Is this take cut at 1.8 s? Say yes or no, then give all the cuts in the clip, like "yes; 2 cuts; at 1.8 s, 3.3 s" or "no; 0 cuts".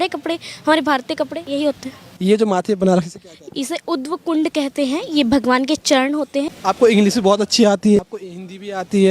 yes; 3 cuts; at 1.8 s, 6.5 s, 8.0 s